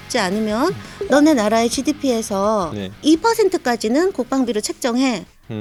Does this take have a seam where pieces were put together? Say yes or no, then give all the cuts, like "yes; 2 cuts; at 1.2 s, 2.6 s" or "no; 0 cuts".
no; 0 cuts